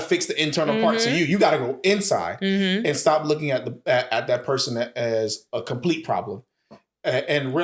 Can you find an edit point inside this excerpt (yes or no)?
no